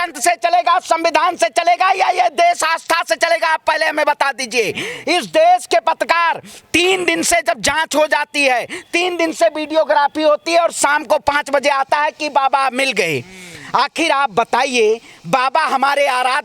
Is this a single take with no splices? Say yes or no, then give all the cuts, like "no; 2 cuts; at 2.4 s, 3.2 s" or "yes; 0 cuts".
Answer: yes; 0 cuts